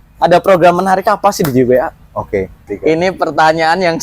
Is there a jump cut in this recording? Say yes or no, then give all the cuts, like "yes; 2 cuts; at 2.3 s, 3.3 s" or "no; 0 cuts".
yes; 1 cut; at 2.6 s